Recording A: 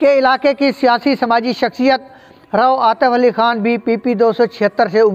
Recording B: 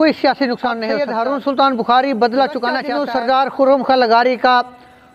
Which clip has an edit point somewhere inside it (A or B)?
B